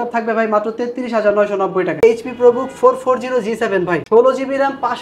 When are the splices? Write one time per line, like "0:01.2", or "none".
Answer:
0:02.0
0:04.0